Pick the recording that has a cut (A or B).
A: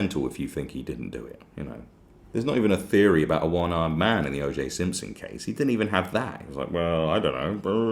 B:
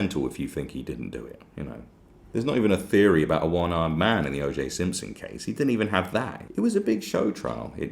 B